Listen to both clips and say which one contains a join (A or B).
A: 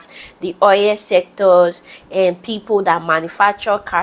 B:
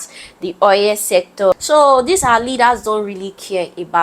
B